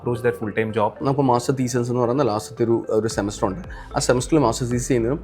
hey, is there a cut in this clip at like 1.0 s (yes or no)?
yes